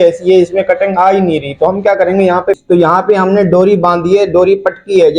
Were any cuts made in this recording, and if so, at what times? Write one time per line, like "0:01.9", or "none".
0:02.6